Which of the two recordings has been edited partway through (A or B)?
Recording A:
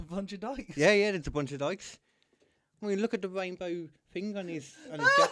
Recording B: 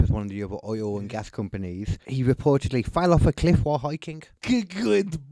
B